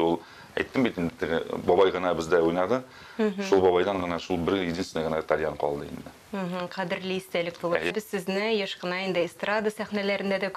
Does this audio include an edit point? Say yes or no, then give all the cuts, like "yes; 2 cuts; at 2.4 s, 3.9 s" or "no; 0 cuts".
yes; 1 cut; at 7.9 s